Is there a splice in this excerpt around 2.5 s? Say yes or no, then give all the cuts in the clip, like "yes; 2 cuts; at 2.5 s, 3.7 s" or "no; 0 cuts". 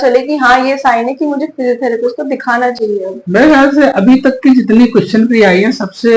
no; 0 cuts